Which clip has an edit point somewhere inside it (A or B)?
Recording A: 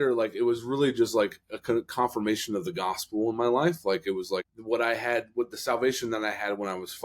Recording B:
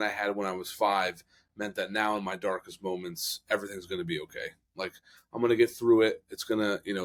A